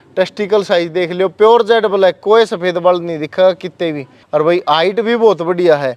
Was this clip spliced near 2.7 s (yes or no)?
no